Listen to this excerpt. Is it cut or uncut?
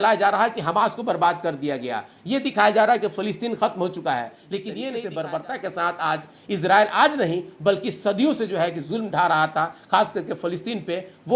cut